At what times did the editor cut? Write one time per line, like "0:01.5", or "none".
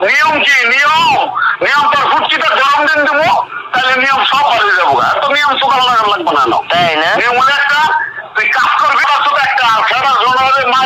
none

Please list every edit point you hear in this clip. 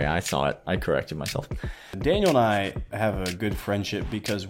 0:01.9

